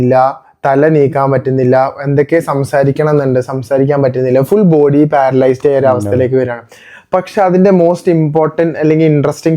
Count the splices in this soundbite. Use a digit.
0